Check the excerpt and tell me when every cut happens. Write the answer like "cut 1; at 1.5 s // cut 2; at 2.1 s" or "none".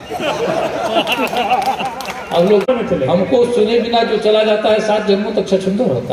cut 1; at 2.7 s